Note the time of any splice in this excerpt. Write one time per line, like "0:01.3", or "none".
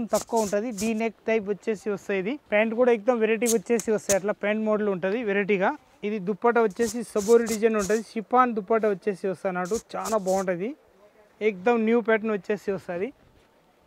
none